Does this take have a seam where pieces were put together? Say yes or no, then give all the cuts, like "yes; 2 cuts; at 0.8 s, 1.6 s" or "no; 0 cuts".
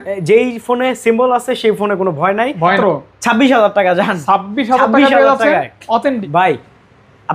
yes; 2 cuts; at 2.8 s, 6.2 s